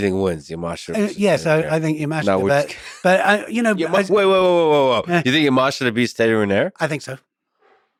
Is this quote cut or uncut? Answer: uncut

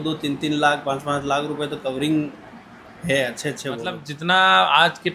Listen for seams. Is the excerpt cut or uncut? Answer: cut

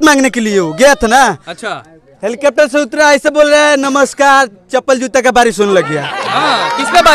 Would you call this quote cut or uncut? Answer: uncut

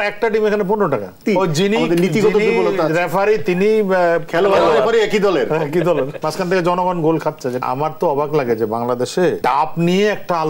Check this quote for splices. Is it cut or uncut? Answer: cut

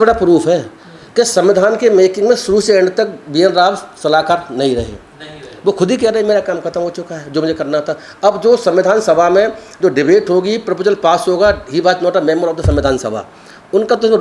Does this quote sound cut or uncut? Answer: uncut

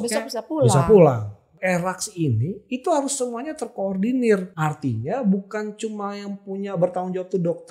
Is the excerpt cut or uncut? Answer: cut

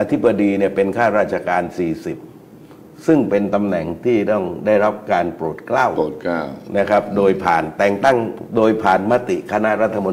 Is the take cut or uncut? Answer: uncut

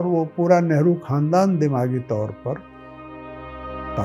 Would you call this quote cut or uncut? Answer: uncut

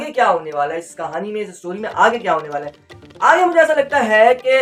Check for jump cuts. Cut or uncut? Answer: uncut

